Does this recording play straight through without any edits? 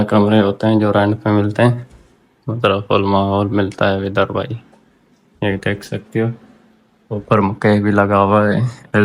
yes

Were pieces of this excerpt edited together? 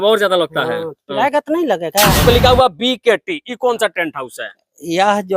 yes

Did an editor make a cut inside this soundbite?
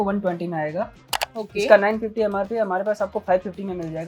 yes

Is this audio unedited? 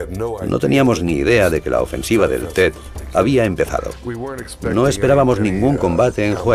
yes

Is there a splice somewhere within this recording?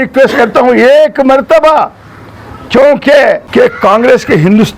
yes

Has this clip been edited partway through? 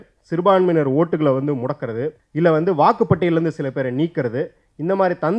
yes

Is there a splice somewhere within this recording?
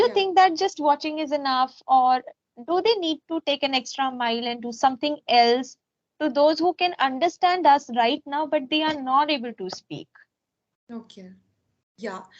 no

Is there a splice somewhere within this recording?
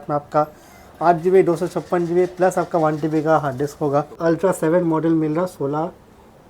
yes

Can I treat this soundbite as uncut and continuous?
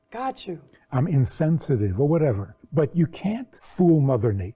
no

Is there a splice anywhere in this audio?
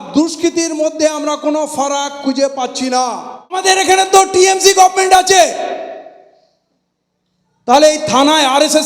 yes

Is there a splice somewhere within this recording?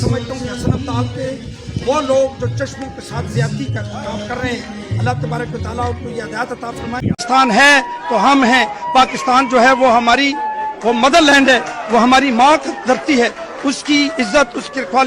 yes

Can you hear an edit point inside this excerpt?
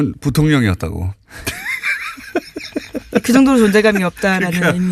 no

